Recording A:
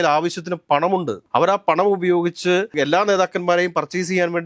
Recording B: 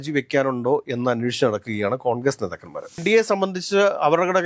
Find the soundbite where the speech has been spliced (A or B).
B